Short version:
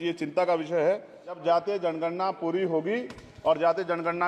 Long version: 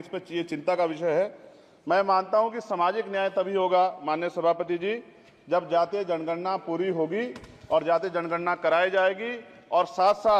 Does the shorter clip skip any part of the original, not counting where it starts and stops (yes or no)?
yes